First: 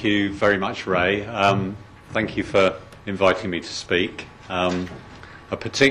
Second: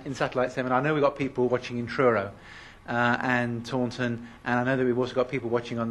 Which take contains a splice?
first; 1 cut; at 3.6 s

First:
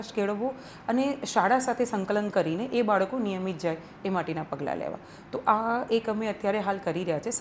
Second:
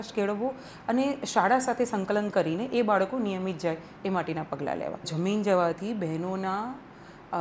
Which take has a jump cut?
second; 1 cut; at 5.1 s

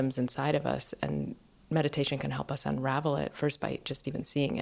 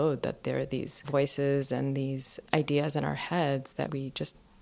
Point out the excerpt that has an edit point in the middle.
second; 3 cuts; at 1.0 s, 2.4 s, 3.9 s

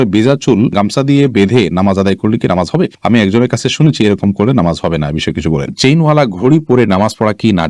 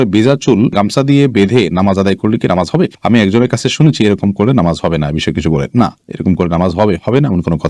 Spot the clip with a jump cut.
first; 1 cut; at 5.7 s

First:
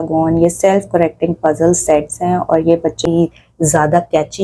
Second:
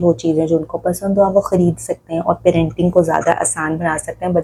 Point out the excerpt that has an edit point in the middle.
first; 1 cut; at 3.0 s

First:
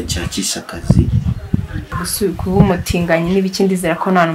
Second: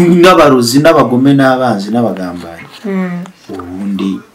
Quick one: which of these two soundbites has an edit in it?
first; 1 cut; at 2.0 s

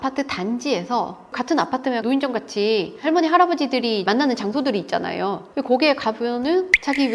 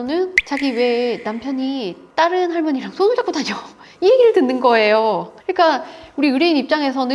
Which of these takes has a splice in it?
first; 1 cut; at 1.2 s

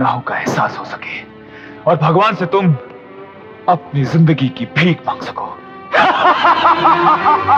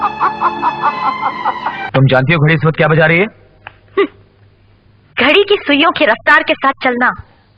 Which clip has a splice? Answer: second; 1 cut; at 1.8 s

